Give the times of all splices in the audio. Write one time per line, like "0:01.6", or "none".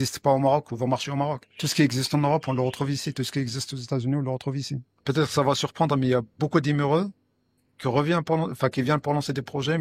0:05.0